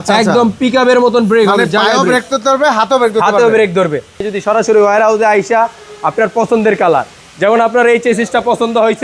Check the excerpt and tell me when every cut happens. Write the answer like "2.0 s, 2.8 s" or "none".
4.2 s